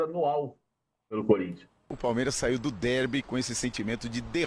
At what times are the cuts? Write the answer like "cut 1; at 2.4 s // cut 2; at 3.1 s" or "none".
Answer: cut 1; at 1.9 s